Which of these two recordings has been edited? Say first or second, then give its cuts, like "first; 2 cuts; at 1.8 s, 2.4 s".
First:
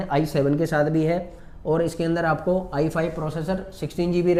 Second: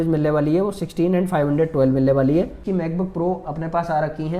second; 1 cut; at 2.6 s